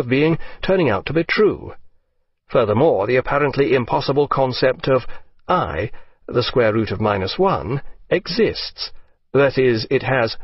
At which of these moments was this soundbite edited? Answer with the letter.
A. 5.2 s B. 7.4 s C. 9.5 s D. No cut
B